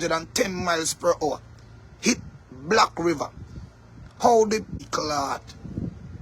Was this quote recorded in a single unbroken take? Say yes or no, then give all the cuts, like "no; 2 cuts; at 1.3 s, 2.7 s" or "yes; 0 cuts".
no; 1 cut; at 4.8 s